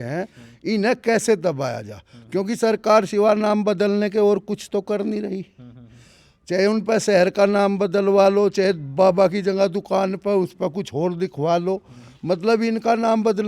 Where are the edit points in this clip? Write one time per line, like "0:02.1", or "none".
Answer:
none